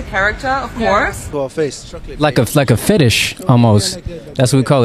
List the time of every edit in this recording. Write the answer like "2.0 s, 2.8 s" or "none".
1.2 s